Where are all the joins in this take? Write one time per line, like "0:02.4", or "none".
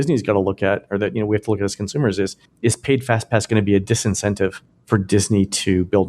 0:04.7